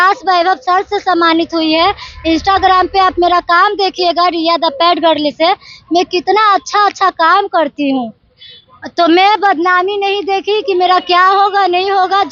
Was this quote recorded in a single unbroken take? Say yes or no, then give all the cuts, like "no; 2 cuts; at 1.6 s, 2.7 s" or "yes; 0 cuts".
yes; 0 cuts